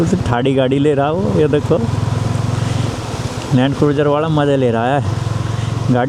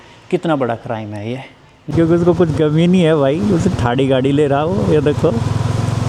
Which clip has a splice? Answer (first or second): second